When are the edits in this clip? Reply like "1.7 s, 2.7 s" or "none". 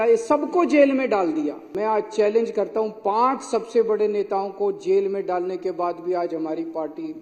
1.6 s